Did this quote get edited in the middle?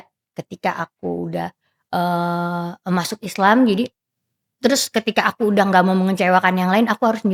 no; 0 cuts

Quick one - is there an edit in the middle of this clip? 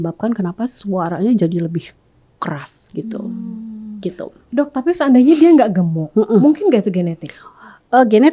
no; 0 cuts

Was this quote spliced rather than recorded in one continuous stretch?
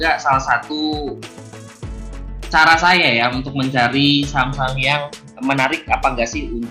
no; 0 cuts

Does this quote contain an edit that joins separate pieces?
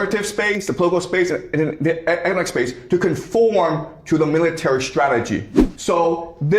yes; 1 cut; at 5.7 s

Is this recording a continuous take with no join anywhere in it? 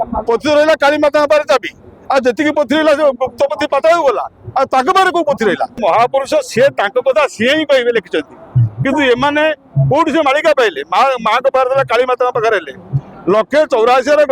no; 1 cut; at 5.7 s

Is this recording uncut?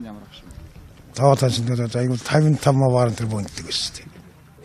no; 1 cut; at 2.4 s

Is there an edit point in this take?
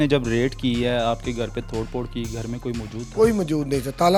no; 0 cuts

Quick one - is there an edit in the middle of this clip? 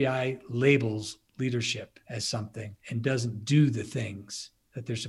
yes; 2 cuts; at 2.0 s, 2.8 s

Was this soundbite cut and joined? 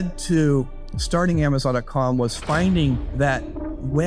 no; 0 cuts

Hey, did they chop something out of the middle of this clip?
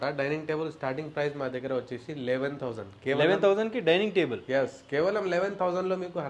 no; 0 cuts

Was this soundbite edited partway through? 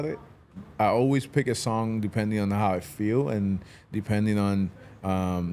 no; 0 cuts

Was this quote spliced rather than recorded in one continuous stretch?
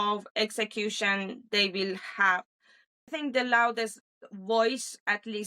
yes; 1 cut; at 3.1 s

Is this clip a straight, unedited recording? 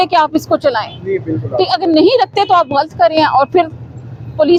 yes; 0 cuts

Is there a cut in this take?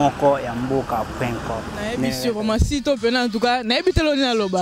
yes; 1 cut; at 2.1 s

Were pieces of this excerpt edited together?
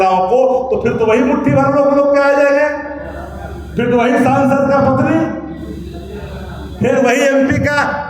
no; 0 cuts

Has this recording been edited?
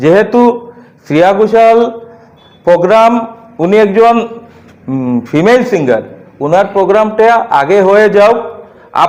no; 0 cuts

